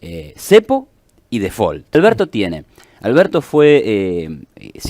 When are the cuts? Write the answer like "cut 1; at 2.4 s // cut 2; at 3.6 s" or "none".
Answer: cut 1; at 2.0 s